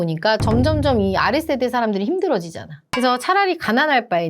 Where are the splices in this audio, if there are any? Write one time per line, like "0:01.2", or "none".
0:02.8

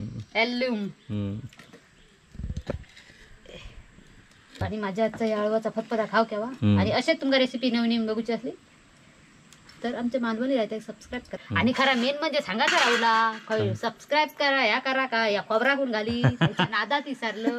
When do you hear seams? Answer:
0:04.7
0:11.3

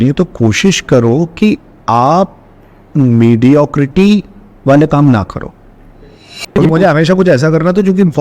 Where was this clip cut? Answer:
0:06.6

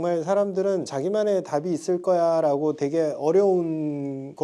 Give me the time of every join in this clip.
0:00.9

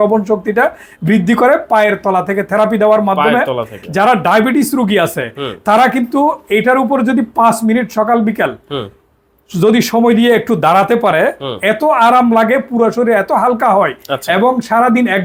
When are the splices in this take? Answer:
none

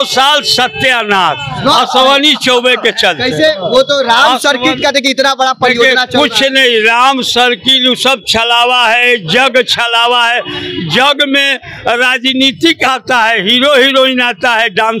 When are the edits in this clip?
none

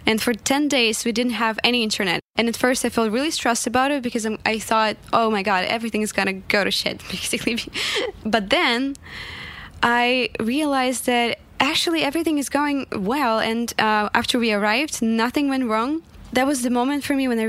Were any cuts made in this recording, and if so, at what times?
0:02.2
0:06.4
0:08.1
0:16.1

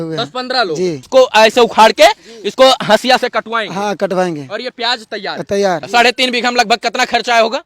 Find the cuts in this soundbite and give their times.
0:01.0
0:05.9

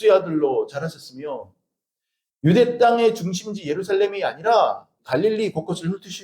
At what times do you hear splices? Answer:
0:04.9

